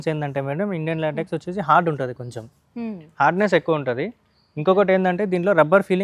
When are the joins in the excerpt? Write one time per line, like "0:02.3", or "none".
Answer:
none